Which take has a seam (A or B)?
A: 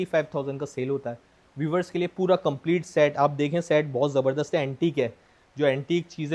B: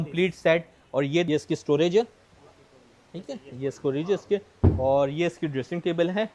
B